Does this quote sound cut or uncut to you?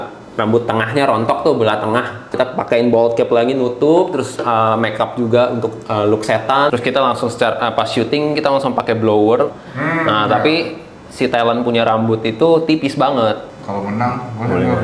cut